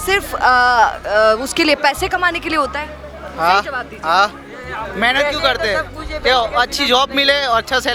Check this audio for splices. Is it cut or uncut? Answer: uncut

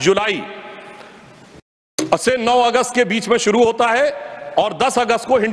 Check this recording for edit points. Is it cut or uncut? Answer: uncut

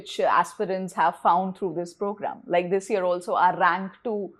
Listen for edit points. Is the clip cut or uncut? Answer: uncut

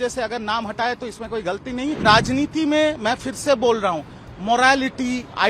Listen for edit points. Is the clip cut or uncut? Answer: cut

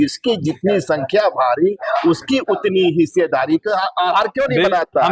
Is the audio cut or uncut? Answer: uncut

